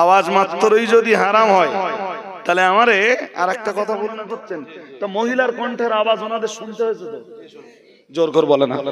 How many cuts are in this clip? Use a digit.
1